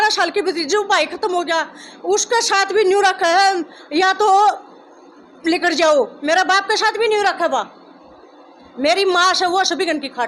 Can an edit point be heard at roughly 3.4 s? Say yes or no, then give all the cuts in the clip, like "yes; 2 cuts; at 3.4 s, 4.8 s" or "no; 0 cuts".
no; 0 cuts